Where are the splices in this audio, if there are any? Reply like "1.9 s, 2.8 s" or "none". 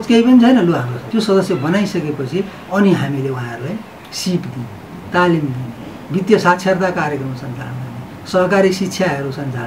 1.0 s, 4.0 s